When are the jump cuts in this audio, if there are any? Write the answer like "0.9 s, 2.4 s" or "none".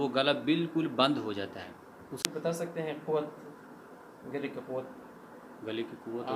2.2 s